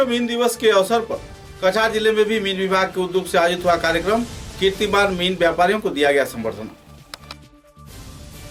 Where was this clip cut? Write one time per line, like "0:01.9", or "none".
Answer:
none